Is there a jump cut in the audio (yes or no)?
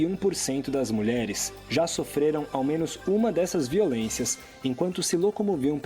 no